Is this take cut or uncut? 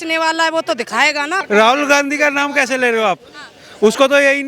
cut